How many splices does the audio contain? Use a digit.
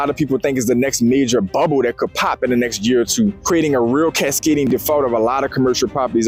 0